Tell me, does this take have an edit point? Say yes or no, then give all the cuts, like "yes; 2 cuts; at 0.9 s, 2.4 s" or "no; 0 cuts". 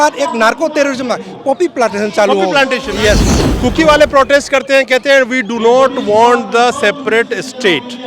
yes; 1 cut; at 3.4 s